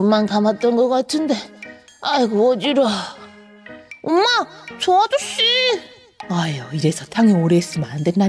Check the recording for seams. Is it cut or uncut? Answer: uncut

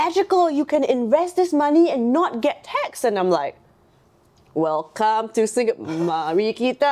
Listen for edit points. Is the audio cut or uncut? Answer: uncut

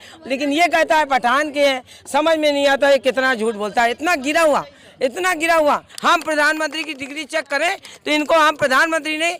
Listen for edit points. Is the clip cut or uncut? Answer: cut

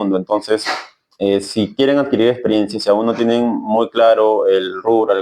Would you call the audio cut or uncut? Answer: uncut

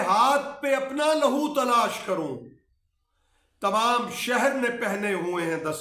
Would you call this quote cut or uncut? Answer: uncut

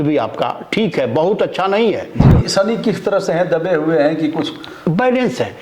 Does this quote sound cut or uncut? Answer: cut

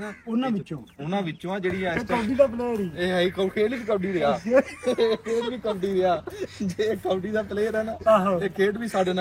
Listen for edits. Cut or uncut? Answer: cut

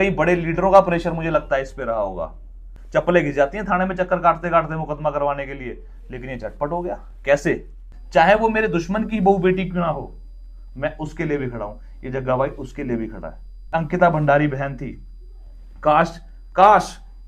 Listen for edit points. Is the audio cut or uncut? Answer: cut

